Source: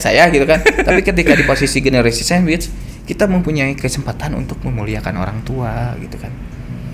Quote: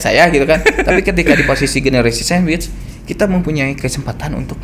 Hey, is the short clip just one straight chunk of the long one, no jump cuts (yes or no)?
yes